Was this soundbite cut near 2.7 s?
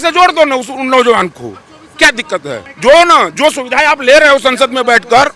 yes; 1 cut; at 2.7 s

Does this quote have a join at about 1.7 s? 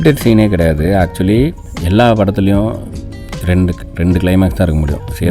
yes; 1 cut; at 1.7 s

